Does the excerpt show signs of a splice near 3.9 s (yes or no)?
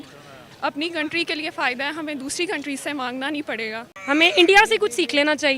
yes